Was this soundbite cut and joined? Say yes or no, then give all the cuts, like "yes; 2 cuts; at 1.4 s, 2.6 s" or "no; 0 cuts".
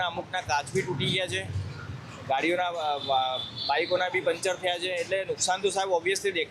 no; 0 cuts